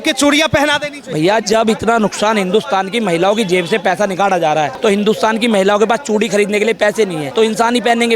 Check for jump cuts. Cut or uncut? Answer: cut